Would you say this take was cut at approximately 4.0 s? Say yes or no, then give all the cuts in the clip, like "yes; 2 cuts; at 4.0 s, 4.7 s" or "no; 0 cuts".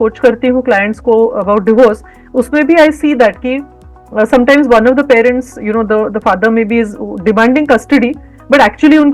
no; 0 cuts